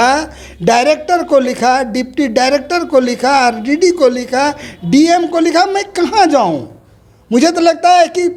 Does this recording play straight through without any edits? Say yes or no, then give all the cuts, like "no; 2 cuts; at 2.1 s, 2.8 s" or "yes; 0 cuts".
yes; 0 cuts